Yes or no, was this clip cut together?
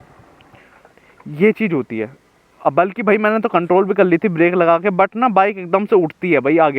no